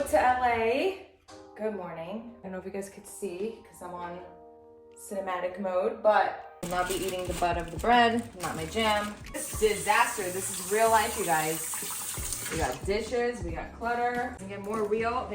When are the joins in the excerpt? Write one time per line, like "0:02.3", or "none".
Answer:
0:02.5
0:06.5
0:09.5
0:14.4